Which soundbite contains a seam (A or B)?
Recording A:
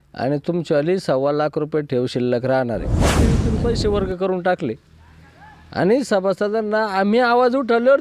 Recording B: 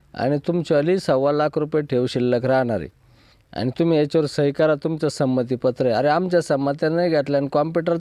A